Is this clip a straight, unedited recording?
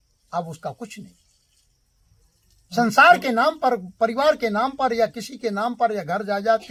yes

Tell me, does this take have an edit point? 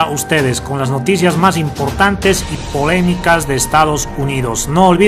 no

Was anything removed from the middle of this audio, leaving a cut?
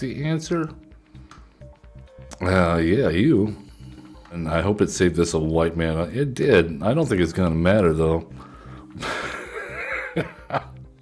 yes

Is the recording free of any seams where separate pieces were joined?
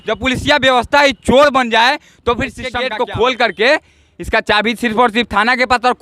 no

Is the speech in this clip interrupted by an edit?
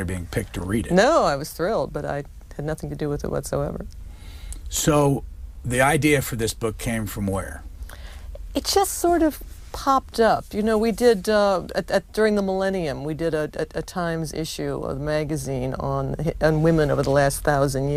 no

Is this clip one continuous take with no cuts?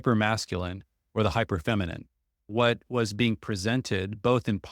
no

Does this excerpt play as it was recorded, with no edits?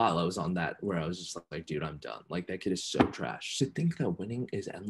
no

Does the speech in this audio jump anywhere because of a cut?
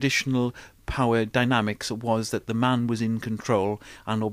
yes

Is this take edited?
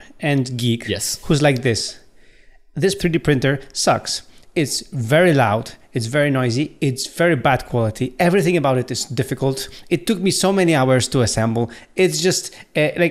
yes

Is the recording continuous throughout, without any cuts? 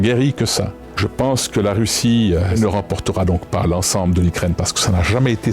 no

